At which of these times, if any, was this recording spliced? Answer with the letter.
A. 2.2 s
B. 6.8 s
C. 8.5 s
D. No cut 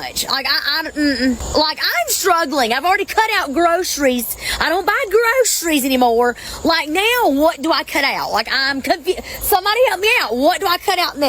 B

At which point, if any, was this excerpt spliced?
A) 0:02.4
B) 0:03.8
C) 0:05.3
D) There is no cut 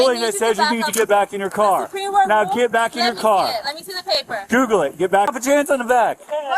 C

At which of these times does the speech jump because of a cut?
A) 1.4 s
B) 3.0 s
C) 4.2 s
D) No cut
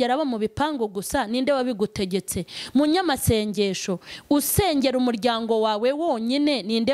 D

